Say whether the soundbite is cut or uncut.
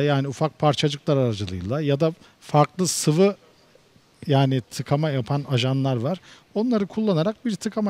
uncut